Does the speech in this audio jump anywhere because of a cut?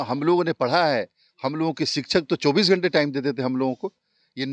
no; 0 cuts

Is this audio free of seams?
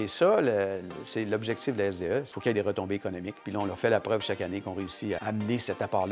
yes; 0 cuts

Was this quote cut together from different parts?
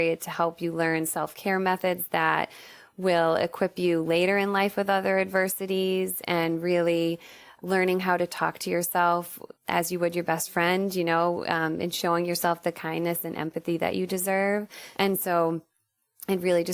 yes; 1 cut; at 14.8 s

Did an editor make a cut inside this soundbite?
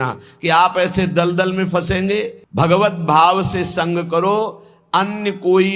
yes; 1 cut; at 2.4 s

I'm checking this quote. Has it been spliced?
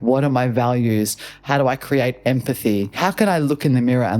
yes; 1 cut; at 2.9 s

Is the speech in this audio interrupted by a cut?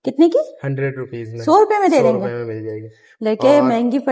no; 0 cuts

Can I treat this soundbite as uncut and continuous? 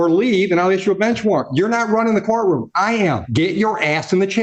no; 1 cut; at 3.2 s

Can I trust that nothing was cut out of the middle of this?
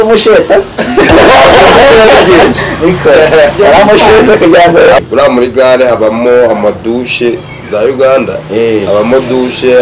no; 1 cut; at 5.0 s

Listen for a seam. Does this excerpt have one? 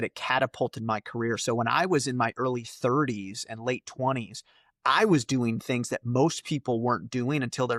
no; 0 cuts

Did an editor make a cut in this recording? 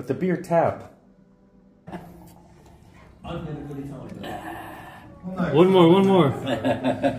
yes; 1 cut; at 1.9 s

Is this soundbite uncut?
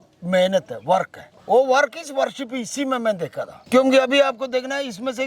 yes; 0 cuts

